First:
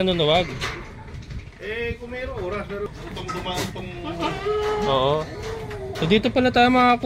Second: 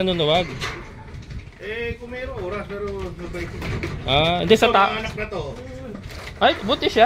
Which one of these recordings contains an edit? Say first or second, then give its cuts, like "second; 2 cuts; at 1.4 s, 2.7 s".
first; 1 cut; at 2.9 s